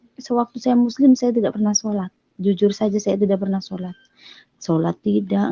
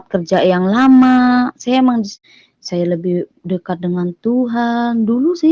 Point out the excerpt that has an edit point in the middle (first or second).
second